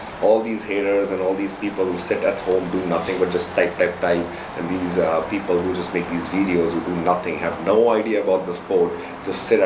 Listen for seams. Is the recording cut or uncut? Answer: cut